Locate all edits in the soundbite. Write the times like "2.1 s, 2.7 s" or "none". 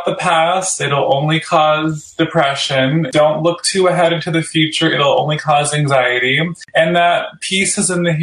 3.1 s, 6.6 s